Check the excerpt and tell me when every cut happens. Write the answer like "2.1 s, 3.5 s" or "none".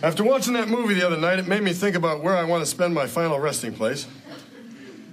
none